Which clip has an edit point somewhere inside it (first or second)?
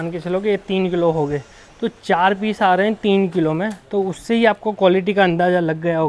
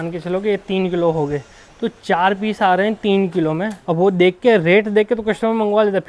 second